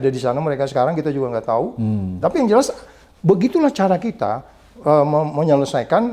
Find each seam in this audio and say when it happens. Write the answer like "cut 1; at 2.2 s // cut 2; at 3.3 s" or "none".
none